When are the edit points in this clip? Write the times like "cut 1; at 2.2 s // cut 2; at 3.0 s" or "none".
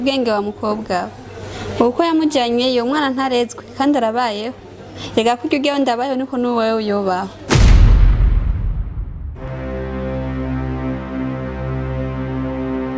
none